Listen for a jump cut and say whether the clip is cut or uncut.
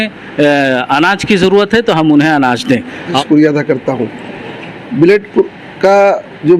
cut